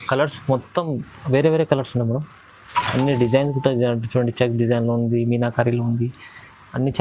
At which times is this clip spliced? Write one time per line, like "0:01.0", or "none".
none

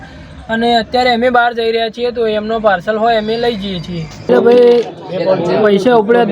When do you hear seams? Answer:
0:04.1

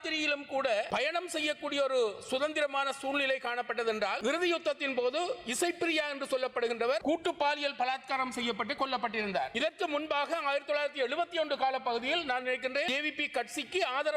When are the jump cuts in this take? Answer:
0:00.9
0:04.2
0:07.0
0:09.5
0:12.9

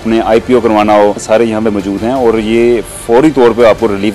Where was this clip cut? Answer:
0:01.2

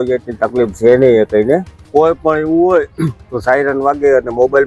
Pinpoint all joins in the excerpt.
0:01.9

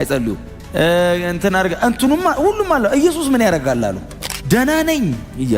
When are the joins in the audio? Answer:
0:04.3

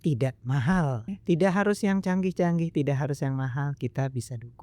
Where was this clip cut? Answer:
0:01.1

